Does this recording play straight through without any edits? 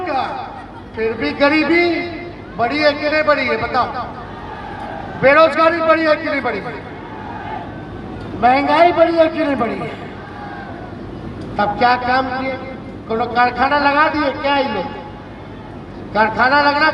yes; 0 cuts

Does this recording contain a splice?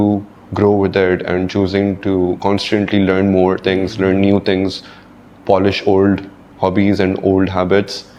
no; 0 cuts

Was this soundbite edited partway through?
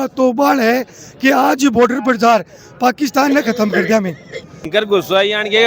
yes; 1 cut; at 4.7 s

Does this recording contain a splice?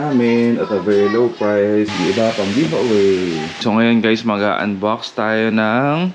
yes; 2 cuts; at 1.9 s, 3.5 s

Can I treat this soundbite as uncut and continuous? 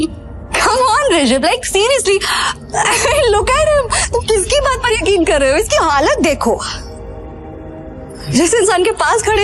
yes; 0 cuts

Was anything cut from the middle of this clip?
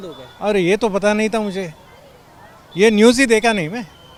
no; 0 cuts

